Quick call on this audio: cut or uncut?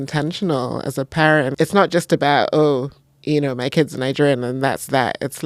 cut